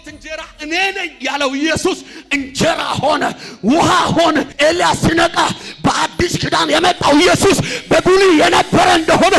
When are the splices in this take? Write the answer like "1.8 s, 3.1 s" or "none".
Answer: 4.5 s